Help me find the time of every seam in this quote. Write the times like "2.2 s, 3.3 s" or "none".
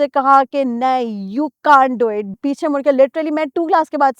2.3 s